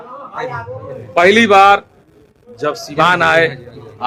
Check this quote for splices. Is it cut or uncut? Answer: uncut